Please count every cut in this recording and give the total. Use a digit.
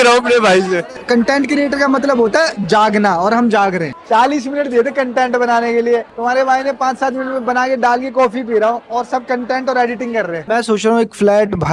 3